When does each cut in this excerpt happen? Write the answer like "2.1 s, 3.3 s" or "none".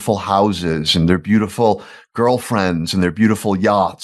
none